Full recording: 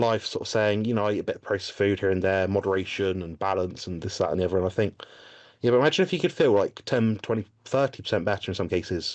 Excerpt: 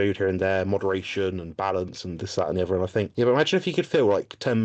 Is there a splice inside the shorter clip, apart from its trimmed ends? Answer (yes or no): yes